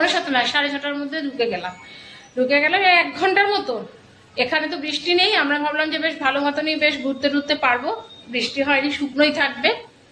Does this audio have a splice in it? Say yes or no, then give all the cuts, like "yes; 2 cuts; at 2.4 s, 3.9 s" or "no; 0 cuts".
no; 0 cuts